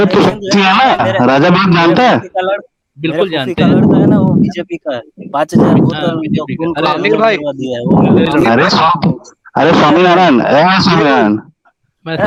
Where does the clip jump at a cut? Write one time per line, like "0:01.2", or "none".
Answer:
none